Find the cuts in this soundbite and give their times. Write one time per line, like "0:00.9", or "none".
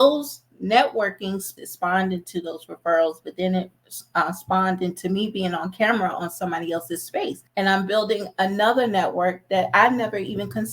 0:01.5
0:07.4